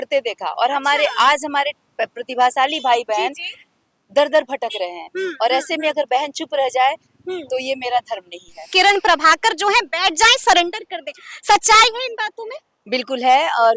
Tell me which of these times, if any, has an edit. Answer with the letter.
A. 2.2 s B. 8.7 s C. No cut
B